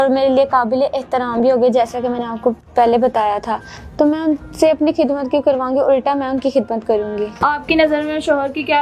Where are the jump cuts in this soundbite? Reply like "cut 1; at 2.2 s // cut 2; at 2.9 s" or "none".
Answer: none

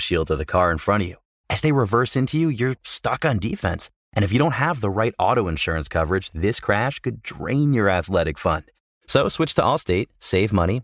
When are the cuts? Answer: none

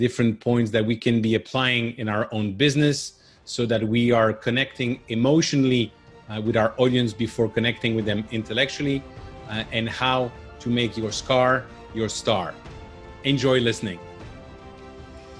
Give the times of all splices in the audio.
cut 1; at 14.0 s

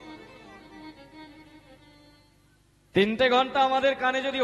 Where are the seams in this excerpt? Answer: none

